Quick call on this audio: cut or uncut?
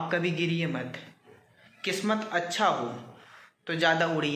uncut